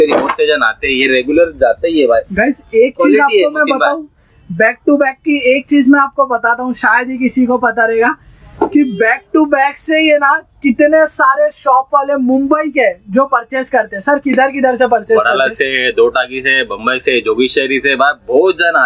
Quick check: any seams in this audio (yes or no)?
no